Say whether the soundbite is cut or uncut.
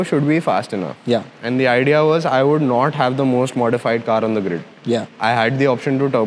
uncut